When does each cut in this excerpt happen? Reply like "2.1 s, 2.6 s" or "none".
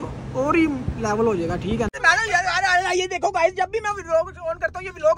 1.9 s